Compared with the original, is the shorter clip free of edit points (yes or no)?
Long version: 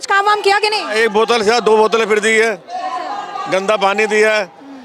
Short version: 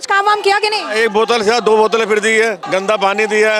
no